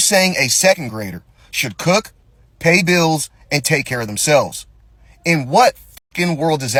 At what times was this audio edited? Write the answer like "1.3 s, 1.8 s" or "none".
none